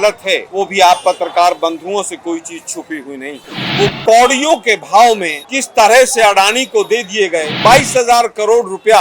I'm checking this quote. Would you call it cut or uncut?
cut